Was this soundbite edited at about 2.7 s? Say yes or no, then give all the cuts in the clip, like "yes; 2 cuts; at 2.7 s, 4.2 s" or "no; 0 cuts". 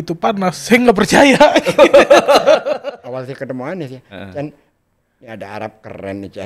yes; 1 cut; at 2.7 s